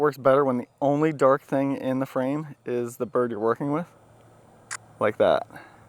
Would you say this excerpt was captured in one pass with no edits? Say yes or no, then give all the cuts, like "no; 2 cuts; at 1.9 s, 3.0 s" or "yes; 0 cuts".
yes; 0 cuts